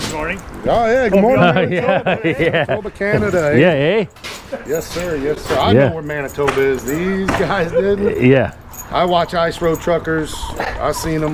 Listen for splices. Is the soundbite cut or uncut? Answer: uncut